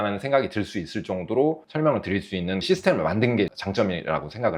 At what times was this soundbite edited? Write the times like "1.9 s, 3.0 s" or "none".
none